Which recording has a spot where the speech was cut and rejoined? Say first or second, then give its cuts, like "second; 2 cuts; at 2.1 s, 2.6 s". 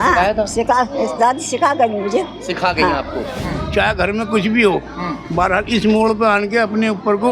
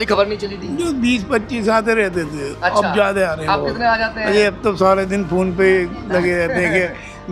first; 1 cut; at 3.4 s